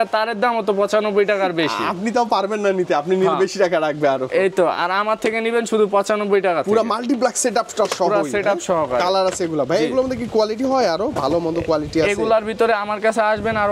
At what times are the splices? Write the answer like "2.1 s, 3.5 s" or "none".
none